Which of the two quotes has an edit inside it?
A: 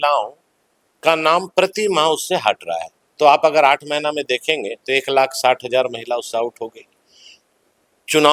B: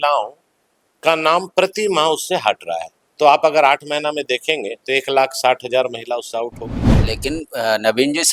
B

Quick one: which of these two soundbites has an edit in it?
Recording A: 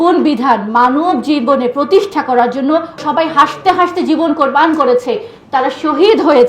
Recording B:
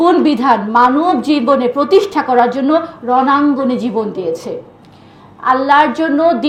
A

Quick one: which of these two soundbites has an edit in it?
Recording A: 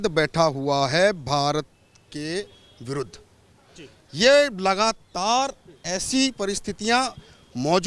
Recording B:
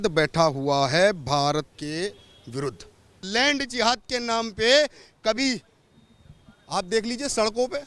B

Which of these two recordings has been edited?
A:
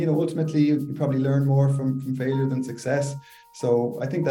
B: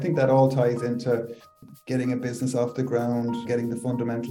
B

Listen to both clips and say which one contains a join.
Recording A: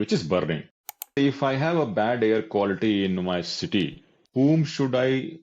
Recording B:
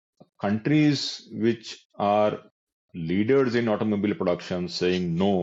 A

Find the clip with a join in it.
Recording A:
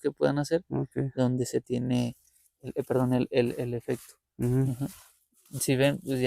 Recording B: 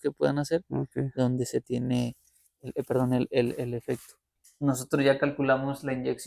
B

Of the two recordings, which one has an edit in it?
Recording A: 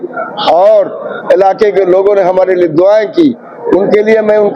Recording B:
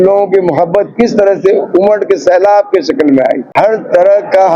B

